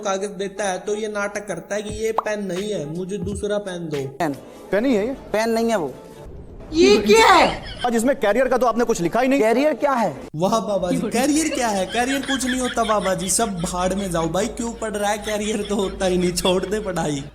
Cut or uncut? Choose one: cut